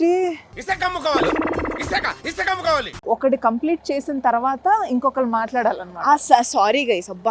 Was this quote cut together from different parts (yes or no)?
yes